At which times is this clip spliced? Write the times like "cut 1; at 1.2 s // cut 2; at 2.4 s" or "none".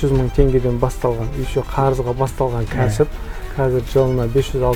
none